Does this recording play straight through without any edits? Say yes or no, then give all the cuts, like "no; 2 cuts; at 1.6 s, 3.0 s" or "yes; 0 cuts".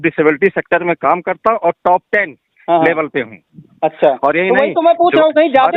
yes; 0 cuts